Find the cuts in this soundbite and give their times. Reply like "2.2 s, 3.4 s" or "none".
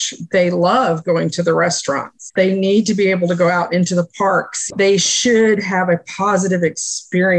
2.2 s